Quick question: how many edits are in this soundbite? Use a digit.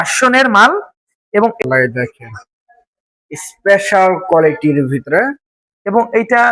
1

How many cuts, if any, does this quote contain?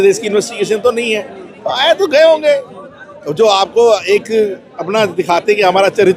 0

